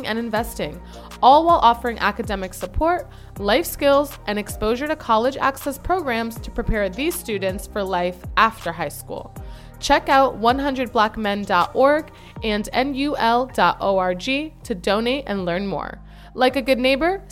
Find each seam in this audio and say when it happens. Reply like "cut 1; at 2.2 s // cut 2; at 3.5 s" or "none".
none